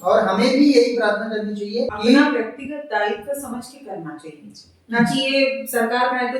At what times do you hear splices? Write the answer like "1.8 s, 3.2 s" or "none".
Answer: 1.9 s